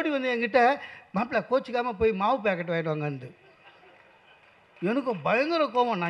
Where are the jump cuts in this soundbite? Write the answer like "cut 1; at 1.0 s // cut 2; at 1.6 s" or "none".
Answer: none

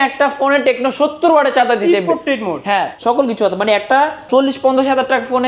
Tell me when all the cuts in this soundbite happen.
cut 1; at 2.9 s // cut 2; at 4.2 s

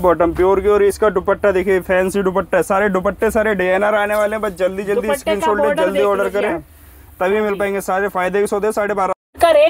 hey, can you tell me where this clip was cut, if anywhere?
none

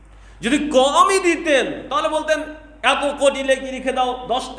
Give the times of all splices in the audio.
none

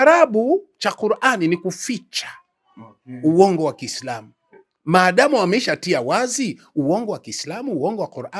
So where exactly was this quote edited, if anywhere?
none

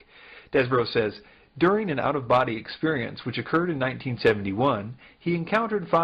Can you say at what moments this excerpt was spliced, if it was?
cut 1; at 1.8 s

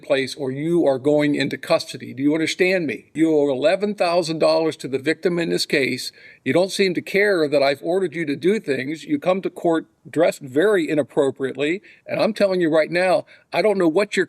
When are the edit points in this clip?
cut 1; at 3.0 s

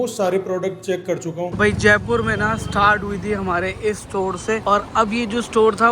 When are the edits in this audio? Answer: cut 1; at 1.5 s // cut 2; at 4.6 s

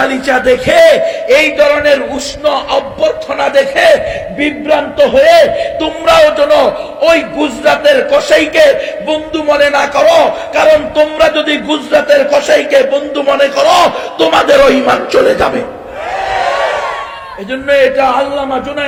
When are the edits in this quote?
none

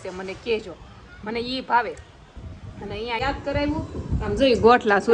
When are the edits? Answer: cut 1; at 3.2 s

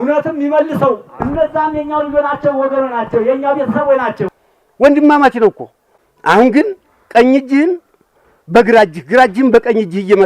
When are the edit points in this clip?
cut 1; at 4.3 s

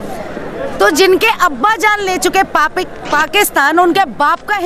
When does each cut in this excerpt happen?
none

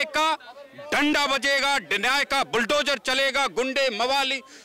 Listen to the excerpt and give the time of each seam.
none

